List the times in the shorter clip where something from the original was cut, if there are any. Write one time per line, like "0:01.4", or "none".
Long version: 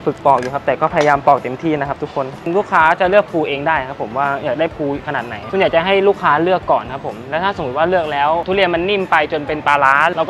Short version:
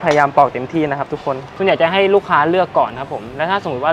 0:01.5